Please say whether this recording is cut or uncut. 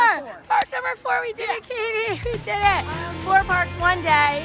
uncut